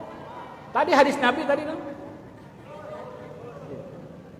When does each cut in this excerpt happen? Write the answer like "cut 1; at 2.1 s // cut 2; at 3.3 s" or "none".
none